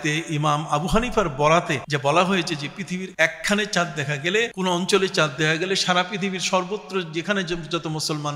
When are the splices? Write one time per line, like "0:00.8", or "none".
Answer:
0:01.8
0:03.1
0:04.5

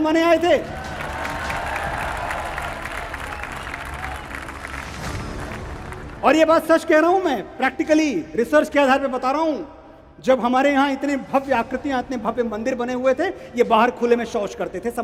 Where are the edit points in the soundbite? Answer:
none

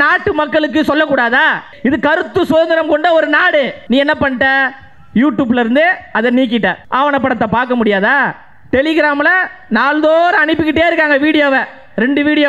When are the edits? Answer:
0:01.7
0:03.8
0:06.8

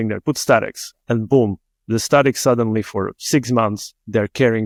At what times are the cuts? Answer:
none

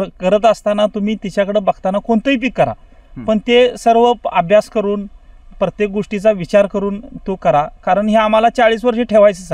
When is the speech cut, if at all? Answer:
none

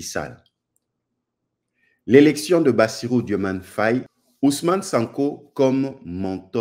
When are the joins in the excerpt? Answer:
0:04.2

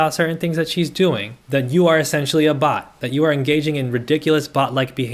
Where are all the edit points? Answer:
none

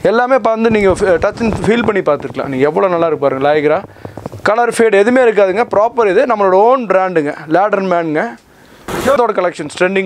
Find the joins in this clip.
0:09.1

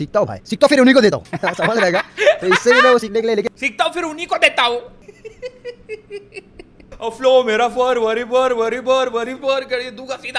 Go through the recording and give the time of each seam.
none

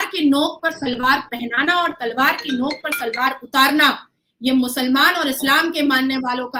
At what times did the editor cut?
none

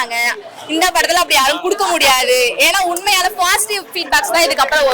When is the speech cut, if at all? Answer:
none

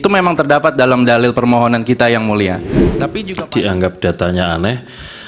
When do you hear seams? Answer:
0:03.0

